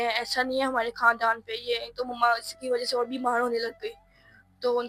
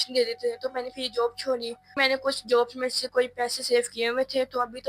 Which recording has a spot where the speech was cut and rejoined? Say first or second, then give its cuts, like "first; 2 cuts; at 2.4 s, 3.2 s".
second; 1 cut; at 1.8 s